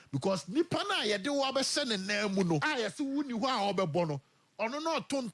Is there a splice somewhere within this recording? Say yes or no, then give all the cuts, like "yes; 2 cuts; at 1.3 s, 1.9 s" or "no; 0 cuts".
yes; 1 cut; at 2.6 s